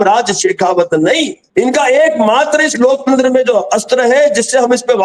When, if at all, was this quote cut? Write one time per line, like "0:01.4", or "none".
none